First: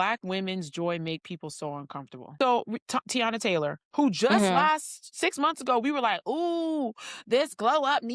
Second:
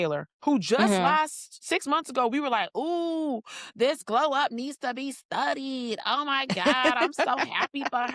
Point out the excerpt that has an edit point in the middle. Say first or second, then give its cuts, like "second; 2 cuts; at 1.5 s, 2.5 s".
first; 1 cut; at 2.2 s